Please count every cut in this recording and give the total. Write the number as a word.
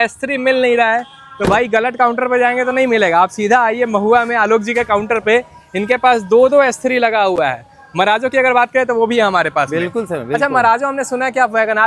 zero